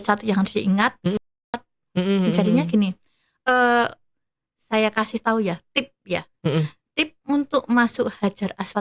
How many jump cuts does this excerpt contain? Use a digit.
1